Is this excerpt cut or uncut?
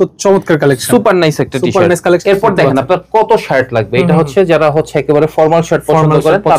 cut